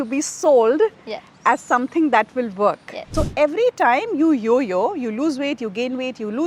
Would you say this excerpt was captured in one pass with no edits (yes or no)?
no